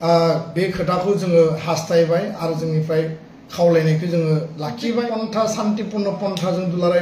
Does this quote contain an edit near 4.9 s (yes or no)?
yes